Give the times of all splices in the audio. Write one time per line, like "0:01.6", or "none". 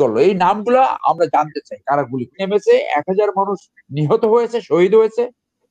0:02.3